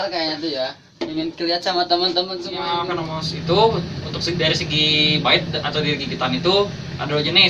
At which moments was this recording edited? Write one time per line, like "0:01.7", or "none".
0:02.8

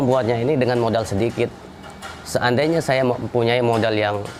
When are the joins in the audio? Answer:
none

